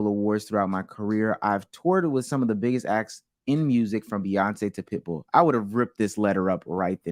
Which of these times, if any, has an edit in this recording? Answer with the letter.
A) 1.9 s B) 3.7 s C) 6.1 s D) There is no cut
D